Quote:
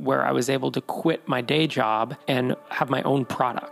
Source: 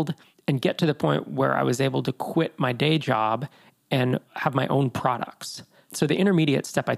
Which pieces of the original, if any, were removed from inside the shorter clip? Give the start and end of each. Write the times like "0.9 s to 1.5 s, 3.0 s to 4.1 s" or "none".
3.9 s to 4.2 s